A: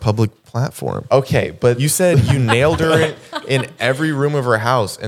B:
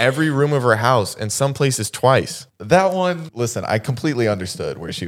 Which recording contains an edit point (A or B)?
B